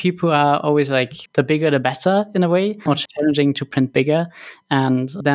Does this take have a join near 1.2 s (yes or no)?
yes